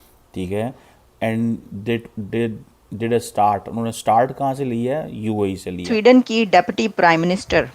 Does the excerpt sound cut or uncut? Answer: cut